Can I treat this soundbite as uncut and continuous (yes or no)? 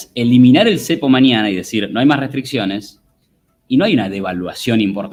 yes